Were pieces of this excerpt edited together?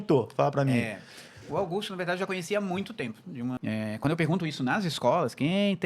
yes; 1 cut; at 3.6 s

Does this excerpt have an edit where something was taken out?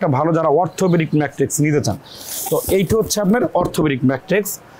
no; 0 cuts

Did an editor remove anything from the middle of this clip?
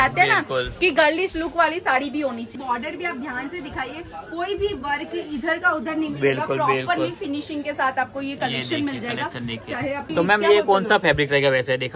yes; 2 cuts; at 2.6 s, 10.1 s

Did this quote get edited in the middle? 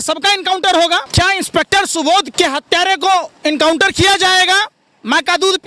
yes; 2 cuts; at 1.1 s, 2.3 s

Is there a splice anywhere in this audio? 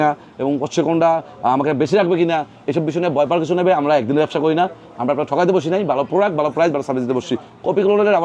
no; 0 cuts

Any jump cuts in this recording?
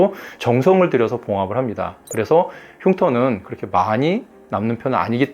no; 0 cuts

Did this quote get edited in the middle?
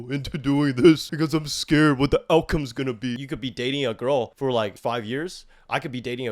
yes; 3 cuts; at 1.1 s, 3.3 s, 4.6 s

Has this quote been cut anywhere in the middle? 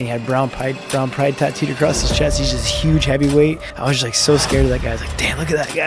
yes; 1 cut; at 3.7 s

